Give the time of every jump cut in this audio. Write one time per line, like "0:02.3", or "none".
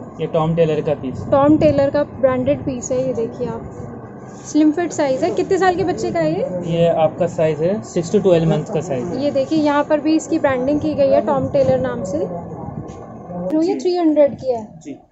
0:13.5